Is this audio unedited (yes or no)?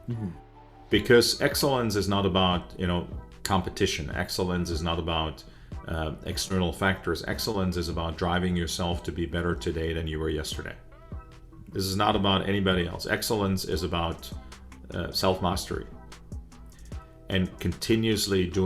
yes